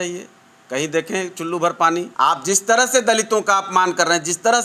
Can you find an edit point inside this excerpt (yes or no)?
yes